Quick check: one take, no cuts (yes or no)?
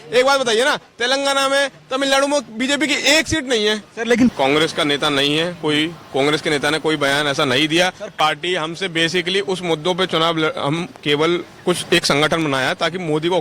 no